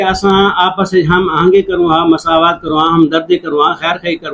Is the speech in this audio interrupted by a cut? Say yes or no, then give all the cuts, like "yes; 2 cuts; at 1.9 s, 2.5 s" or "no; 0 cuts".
no; 0 cuts